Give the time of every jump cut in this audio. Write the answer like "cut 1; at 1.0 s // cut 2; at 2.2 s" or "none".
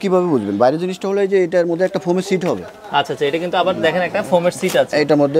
none